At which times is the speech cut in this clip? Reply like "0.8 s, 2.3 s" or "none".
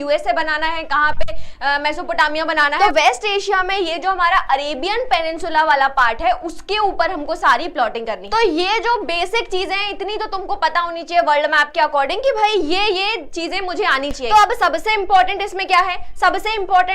2.8 s, 8.2 s, 14.2 s